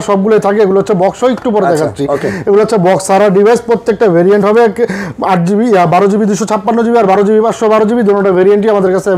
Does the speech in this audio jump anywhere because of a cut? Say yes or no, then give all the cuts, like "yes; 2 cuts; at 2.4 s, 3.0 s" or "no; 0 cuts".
no; 0 cuts